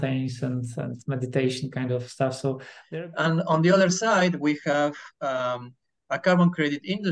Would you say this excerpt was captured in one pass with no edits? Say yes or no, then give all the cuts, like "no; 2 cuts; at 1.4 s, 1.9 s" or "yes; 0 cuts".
no; 1 cut; at 2.7 s